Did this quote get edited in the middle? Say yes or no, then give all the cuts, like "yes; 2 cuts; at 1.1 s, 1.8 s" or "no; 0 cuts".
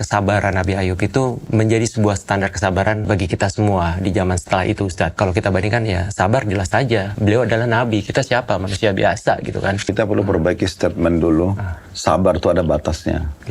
yes; 5 cuts; at 1.4 s, 3.0 s, 5.1 s, 7.1 s, 9.9 s